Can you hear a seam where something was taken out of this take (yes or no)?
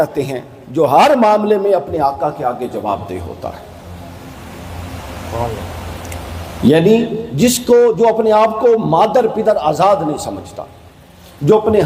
no